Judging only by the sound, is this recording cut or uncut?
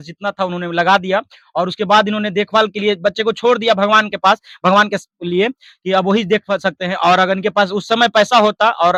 uncut